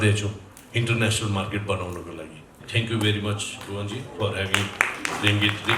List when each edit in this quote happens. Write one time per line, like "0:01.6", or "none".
0:02.6